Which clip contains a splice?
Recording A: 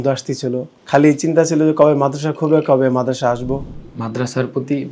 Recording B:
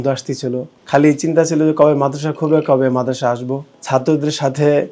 A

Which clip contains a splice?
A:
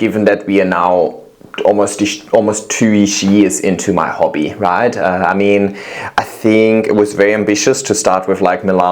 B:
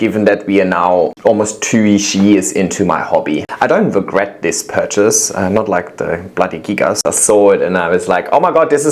B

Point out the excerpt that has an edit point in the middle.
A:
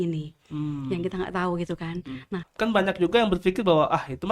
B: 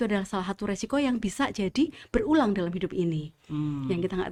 A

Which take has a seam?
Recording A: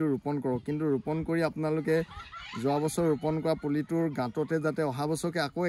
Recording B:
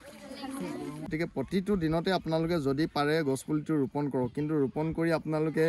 B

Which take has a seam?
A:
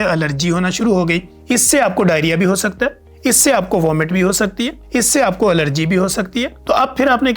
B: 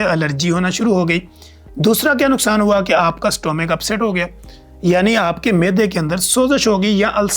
A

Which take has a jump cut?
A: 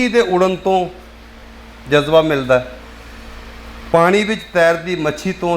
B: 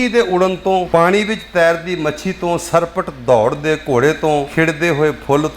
B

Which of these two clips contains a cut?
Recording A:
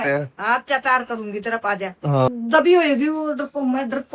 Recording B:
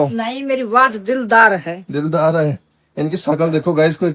A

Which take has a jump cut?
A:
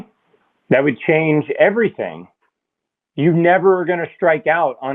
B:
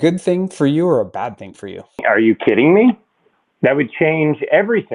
B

